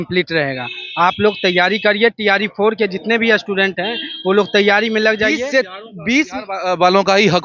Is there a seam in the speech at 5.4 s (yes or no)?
yes